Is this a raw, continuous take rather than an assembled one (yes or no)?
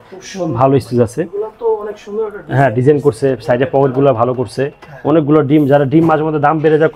yes